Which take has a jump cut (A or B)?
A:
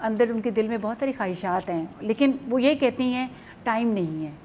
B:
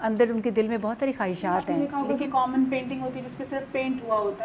B